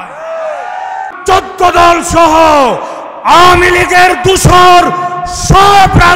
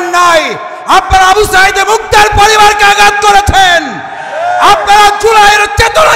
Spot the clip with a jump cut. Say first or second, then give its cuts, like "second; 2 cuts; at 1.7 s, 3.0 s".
first; 1 cut; at 1.1 s